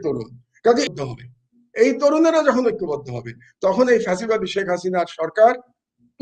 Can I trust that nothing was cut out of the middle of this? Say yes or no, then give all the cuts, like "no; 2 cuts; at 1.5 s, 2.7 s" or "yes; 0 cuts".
no; 1 cut; at 0.9 s